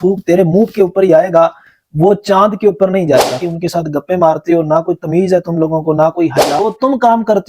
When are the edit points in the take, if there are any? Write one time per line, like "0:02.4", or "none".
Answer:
0:03.4
0:06.6